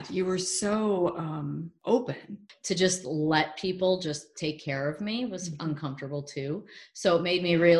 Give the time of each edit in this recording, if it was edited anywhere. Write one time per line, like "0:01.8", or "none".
0:01.7
0:02.5

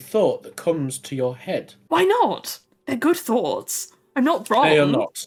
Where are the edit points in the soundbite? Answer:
none

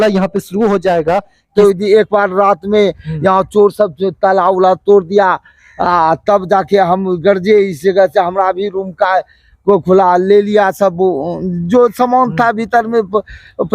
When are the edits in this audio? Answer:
0:01.5

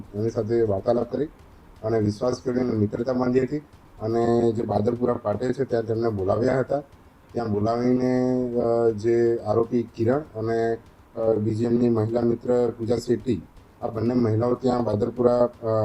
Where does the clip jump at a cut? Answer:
none

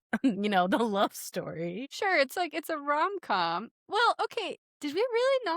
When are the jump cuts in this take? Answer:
0:01.9
0:04.6

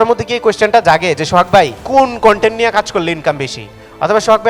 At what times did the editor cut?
0:01.8

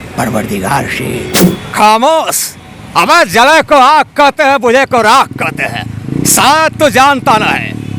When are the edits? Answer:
0:01.5

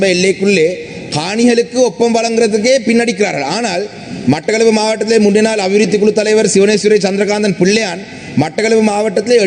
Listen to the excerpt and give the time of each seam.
none

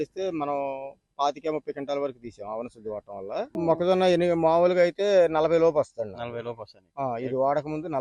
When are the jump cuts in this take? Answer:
0:03.5

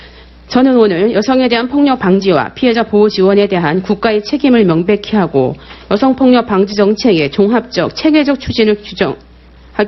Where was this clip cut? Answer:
none

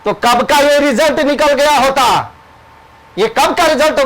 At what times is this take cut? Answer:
none

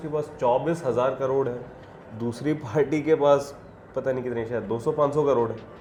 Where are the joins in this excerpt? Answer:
none

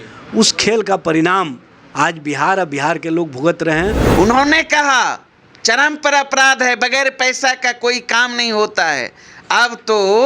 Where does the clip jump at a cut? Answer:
0:04.0

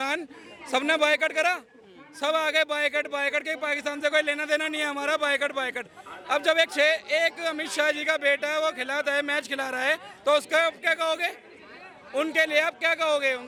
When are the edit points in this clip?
none

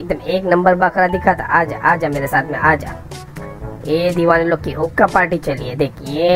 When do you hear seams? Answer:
none

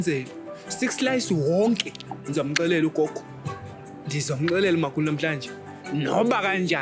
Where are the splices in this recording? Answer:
0:02.2

